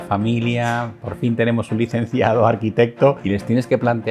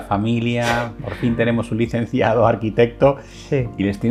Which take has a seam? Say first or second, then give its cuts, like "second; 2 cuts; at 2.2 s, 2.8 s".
first; 1 cut; at 3.2 s